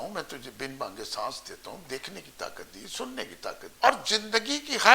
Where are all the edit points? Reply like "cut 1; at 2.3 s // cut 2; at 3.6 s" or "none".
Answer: cut 1; at 3.6 s